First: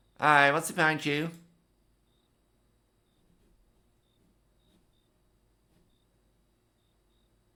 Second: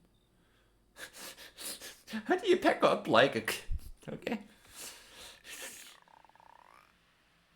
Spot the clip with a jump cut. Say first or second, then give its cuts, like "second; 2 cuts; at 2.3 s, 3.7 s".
second; 1 cut; at 5.9 s